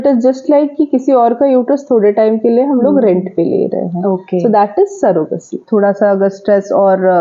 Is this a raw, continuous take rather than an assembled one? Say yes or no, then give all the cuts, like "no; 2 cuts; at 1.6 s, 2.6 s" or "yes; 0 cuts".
no; 1 cut; at 5.6 s